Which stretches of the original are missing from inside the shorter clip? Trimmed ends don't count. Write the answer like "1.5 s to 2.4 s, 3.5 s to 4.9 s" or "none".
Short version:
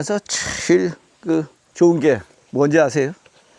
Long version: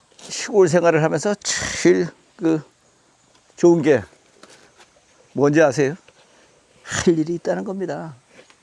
2.8 s to 3.4 s, 4.2 s to 5.2 s